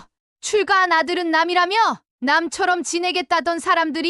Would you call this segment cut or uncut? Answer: uncut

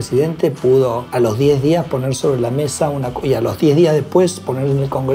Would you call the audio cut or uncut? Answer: cut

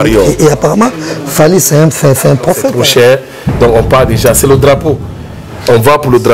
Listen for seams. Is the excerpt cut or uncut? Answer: cut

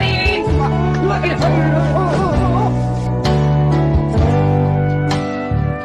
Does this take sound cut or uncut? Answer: uncut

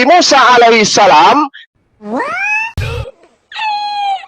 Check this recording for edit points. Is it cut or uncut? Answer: uncut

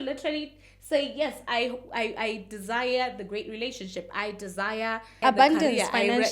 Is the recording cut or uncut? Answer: cut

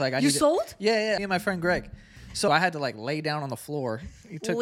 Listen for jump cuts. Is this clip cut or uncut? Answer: cut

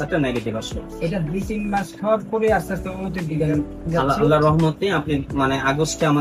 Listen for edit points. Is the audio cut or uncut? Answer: uncut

